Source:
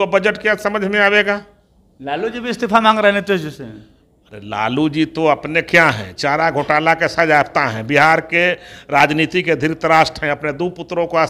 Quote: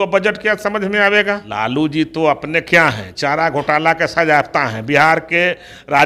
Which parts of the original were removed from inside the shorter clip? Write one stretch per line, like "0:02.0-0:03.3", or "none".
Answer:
0:01.5-0:04.5